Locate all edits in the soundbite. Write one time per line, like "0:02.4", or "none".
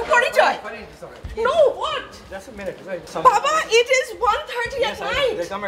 0:03.1

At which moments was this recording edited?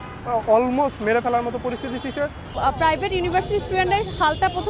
0:02.6

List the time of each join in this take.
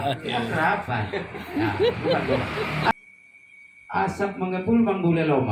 0:02.9

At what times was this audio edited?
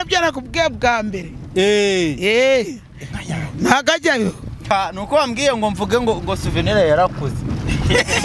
0:04.6

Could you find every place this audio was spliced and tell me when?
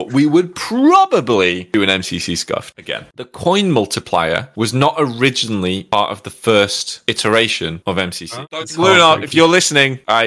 0:03.3
0:08.3

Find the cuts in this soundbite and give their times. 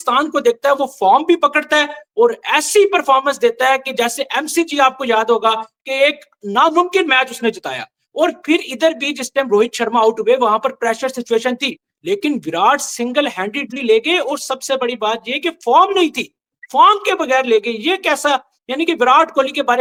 none

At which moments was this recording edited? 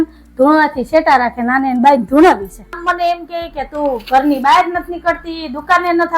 0:02.8

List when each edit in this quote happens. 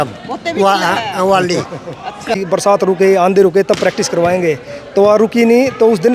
0:02.3

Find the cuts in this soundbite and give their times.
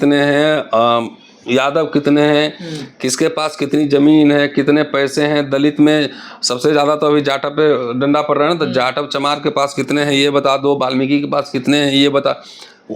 none

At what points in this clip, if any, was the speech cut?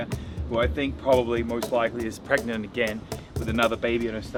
none

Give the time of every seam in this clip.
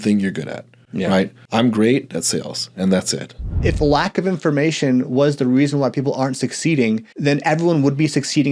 0:01.4
0:03.6
0:07.1

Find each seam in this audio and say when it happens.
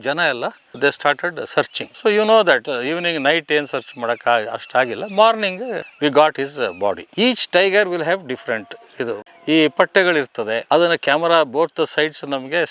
0:07.0
0:09.3

